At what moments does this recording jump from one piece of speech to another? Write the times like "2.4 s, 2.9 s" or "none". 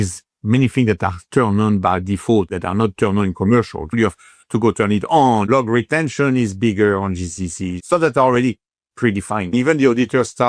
2.5 s, 3.9 s, 5.5 s, 7.7 s, 9.5 s